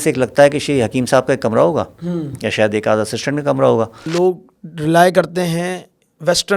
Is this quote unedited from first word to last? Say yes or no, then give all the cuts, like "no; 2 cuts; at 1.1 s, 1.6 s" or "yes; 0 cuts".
no; 1 cut; at 4.1 s